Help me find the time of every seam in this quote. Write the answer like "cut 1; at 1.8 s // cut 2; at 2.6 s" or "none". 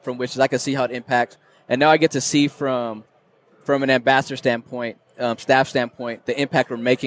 none